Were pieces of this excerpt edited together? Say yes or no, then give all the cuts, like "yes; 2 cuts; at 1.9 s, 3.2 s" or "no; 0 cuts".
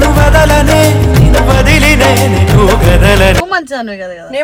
no; 0 cuts